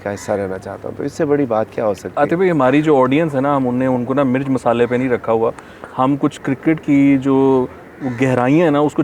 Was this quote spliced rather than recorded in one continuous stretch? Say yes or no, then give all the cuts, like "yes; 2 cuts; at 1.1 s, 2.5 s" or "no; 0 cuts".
no; 0 cuts